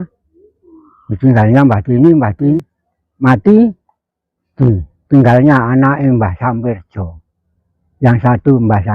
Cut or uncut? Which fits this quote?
cut